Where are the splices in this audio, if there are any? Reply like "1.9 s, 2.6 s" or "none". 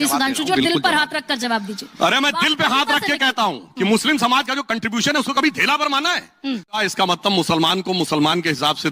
6.9 s